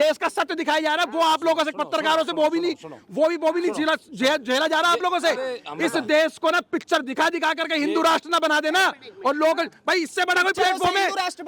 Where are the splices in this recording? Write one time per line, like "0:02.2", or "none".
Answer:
none